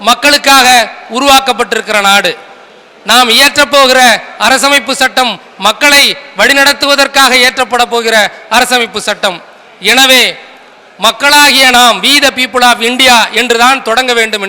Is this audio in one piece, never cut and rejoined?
yes; 0 cuts

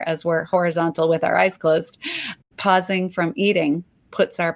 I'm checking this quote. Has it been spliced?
yes; 1 cut; at 2.4 s

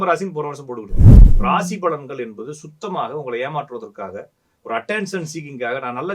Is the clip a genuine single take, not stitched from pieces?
no; 1 cut; at 1.1 s

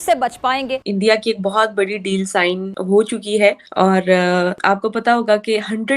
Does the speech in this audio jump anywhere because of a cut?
yes; 4 cuts; at 0.9 s, 2.7 s, 3.6 s, 4.6 s

